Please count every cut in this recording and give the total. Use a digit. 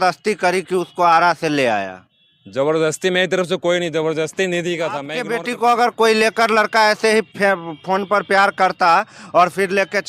1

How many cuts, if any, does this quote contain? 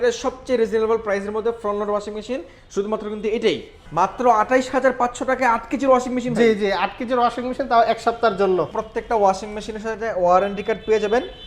2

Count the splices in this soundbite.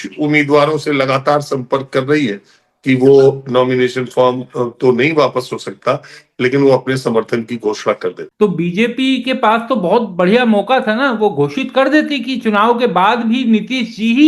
1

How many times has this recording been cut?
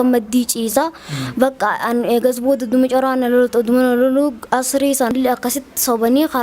1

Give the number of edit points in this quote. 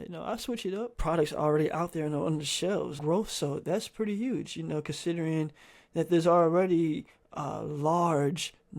2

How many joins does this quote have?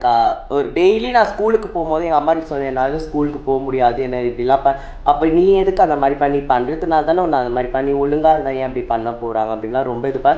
0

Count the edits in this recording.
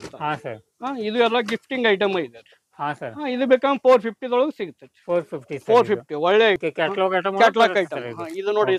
1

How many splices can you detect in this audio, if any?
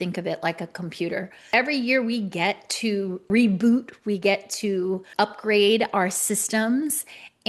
3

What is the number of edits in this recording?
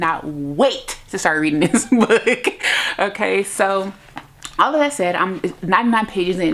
0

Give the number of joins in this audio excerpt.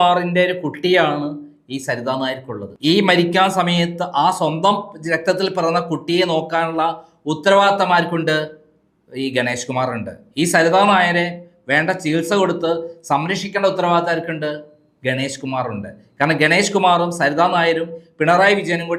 0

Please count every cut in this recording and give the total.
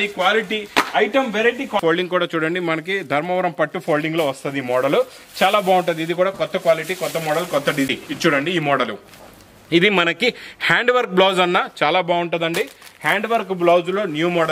2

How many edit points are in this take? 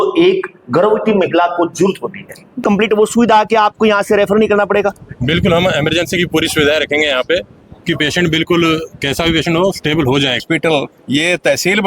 2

